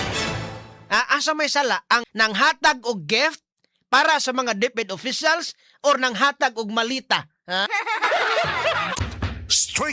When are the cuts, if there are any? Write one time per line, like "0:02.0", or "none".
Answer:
0:02.1
0:08.9